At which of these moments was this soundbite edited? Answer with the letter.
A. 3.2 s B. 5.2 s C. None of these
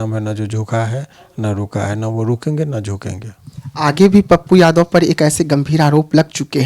C